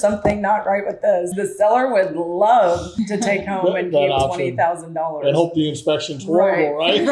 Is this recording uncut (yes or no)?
no